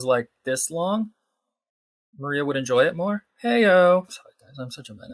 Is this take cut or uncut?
cut